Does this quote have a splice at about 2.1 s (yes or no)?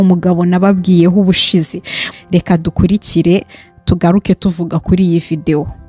yes